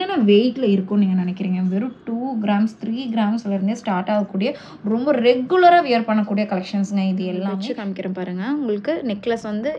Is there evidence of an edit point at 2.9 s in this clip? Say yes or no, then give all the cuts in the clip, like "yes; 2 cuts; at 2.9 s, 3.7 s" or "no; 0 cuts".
no; 1 cut; at 7.7 s